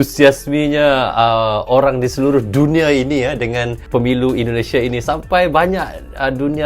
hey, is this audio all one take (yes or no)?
no